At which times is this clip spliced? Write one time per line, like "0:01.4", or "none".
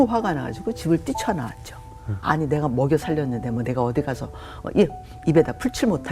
0:02.2